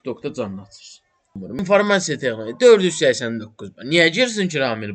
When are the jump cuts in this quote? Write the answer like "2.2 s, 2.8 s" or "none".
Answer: 1.4 s

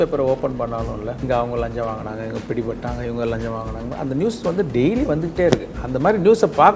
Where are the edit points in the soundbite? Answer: 1.2 s

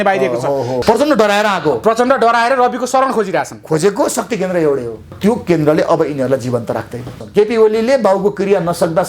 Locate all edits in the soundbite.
0.8 s, 5.1 s, 7.1 s

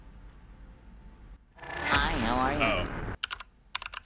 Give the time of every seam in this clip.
3.1 s

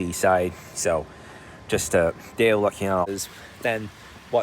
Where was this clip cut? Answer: 3.1 s

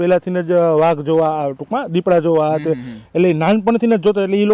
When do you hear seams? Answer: none

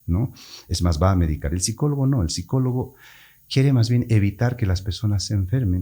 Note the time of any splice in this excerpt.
none

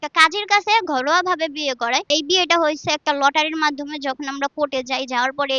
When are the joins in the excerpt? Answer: 2.1 s

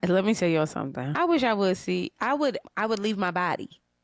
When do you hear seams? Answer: 1.0 s, 2.6 s

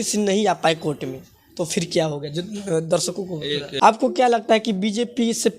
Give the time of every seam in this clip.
3.7 s

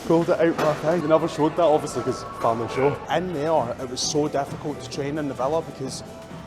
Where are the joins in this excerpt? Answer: 1.0 s, 3.0 s

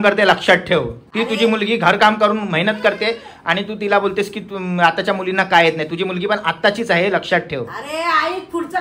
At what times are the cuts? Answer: none

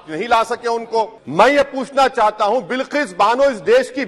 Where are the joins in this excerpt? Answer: 1.1 s

